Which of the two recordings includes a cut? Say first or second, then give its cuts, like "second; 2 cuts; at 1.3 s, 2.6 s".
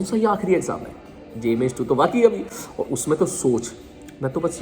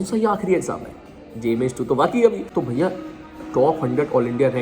second; 1 cut; at 2.4 s